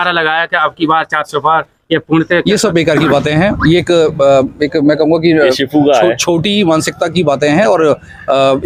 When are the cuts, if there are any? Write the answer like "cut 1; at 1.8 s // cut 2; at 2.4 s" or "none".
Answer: none